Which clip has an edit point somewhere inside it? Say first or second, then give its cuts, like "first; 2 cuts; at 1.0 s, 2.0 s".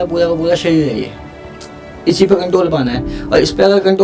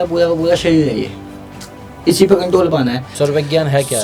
second; 1 cut; at 3.0 s